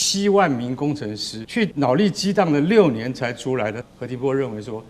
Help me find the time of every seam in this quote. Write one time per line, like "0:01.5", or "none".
0:01.6
0:03.8